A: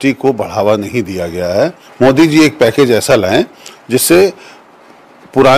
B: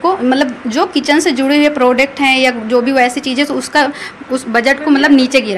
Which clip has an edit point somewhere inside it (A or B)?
A